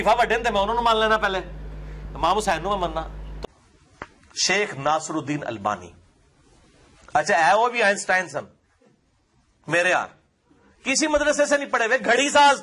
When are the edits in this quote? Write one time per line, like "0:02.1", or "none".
0:03.2